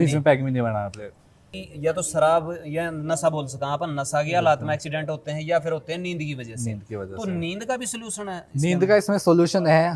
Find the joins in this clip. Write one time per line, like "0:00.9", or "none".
0:01.5